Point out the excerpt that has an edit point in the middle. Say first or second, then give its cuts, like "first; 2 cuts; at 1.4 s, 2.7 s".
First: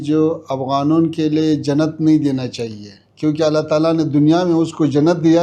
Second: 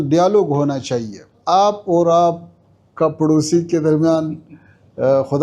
second; 1 cut; at 1.3 s